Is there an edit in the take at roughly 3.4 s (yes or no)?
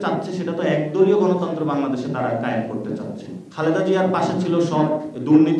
yes